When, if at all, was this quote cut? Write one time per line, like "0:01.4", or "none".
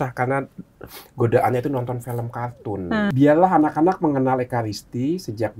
0:03.1